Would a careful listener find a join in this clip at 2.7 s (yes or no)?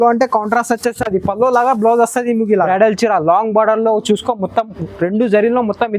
yes